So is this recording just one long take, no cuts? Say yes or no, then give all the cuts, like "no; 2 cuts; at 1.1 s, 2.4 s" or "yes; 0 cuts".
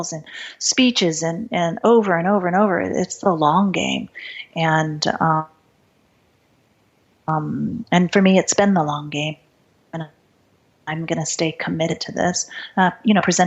yes; 0 cuts